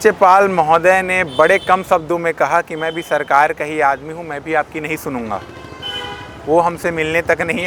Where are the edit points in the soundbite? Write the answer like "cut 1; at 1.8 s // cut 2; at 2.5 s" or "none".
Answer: none